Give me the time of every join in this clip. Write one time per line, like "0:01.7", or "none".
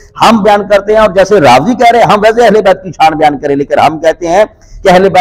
none

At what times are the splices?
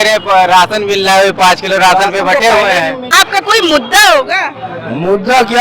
0:03.0

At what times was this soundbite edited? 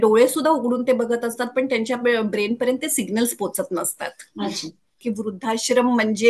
0:04.9

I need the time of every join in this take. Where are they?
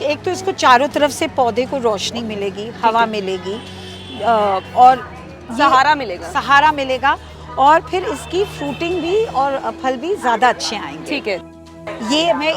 0:11.6

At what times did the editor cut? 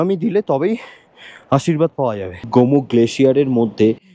0:02.4

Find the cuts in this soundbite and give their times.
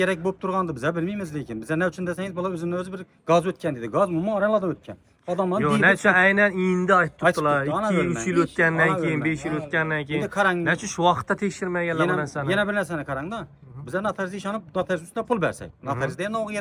none

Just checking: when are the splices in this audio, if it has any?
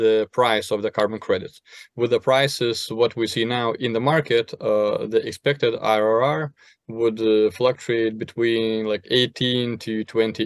none

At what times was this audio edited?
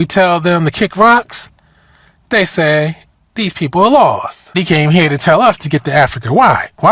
0:04.5

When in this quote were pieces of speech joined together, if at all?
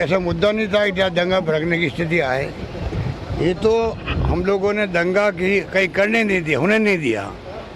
0:03.2

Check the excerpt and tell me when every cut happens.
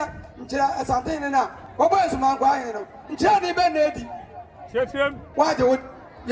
0:01.6
0:05.2

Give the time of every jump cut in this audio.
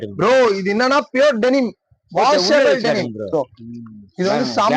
0:03.3

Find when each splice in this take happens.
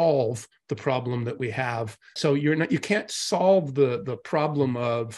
0:02.1

